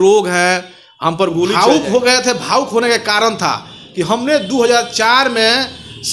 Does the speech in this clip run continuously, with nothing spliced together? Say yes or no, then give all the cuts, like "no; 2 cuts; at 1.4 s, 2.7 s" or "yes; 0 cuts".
no; 1 cut; at 1.5 s